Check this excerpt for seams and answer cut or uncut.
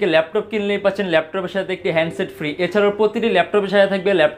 uncut